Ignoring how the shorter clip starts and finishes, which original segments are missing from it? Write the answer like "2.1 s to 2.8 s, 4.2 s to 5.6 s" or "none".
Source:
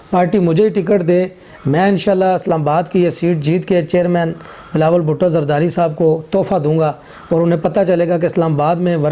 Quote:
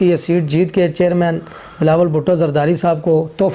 none